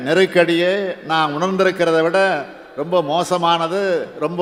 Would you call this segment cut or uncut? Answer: uncut